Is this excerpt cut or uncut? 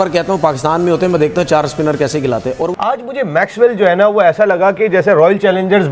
cut